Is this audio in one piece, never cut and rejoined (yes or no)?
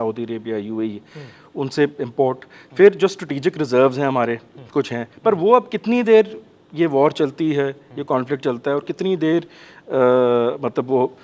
yes